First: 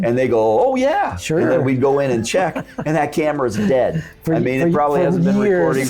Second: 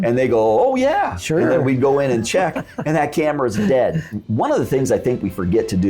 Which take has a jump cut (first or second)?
second